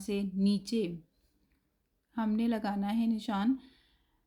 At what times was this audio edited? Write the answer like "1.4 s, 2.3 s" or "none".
none